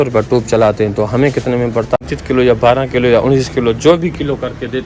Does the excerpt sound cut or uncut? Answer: cut